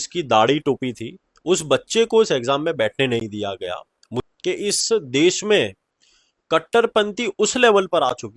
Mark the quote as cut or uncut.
cut